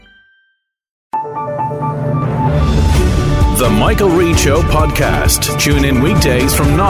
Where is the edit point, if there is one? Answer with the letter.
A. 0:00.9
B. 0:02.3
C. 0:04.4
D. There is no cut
A